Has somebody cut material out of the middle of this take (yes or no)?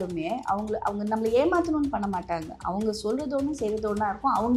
no